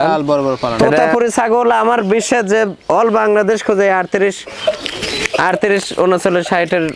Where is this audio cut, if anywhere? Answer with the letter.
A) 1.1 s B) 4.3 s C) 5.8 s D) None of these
A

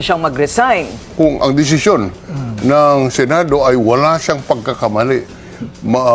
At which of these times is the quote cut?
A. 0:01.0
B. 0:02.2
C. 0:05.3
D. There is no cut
A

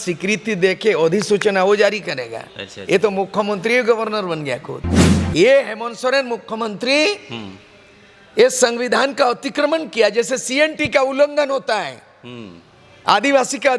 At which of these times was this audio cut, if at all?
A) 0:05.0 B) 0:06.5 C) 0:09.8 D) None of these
A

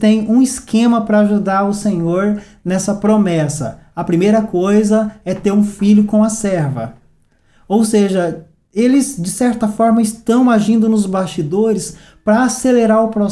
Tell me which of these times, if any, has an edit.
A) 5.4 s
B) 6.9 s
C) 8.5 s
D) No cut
D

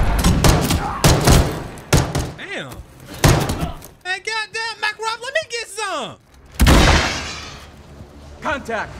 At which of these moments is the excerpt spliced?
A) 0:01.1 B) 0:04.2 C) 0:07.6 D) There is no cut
D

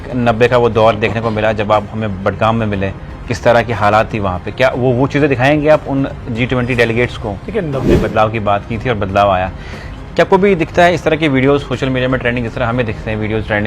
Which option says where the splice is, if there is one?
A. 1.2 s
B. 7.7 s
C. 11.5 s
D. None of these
B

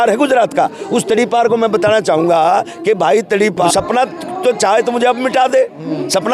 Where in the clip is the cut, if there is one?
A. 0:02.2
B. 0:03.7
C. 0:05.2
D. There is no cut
B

